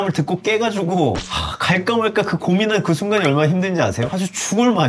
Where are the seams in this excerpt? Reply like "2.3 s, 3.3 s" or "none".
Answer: none